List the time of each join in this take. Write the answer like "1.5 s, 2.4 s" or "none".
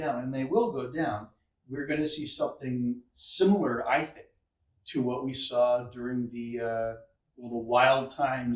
none